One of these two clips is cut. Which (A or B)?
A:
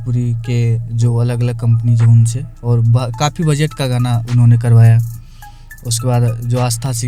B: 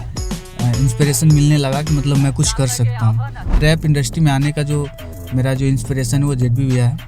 B